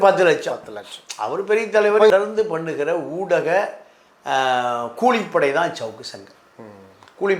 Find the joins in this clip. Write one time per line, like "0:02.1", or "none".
0:02.1